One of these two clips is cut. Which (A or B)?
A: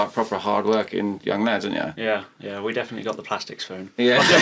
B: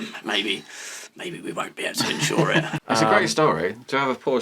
B